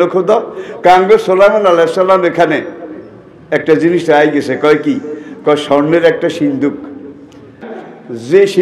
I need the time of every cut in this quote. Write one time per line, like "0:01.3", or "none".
0:07.6